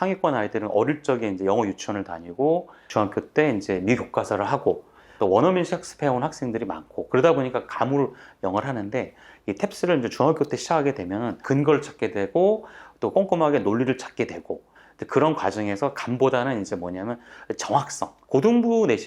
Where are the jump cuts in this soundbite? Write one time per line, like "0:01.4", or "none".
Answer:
0:02.8
0:05.1
0:11.4
0:18.1